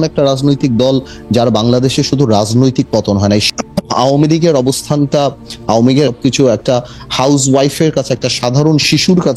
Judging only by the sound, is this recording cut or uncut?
cut